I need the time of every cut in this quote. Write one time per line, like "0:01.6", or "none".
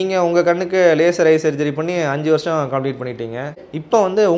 none